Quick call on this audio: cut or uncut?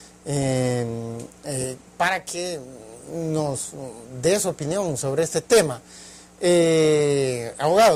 uncut